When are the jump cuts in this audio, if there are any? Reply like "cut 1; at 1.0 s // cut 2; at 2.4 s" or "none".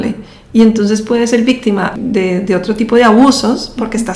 cut 1; at 1.9 s